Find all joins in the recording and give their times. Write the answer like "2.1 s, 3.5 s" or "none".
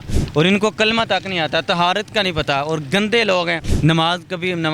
3.6 s